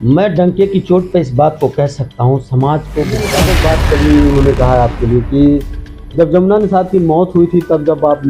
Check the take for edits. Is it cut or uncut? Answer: cut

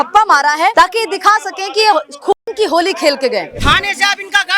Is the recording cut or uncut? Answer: cut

